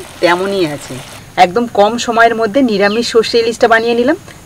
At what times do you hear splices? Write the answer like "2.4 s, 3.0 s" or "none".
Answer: 1.2 s